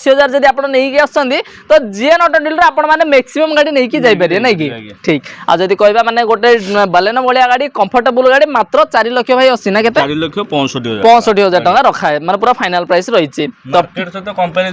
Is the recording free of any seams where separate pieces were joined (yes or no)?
yes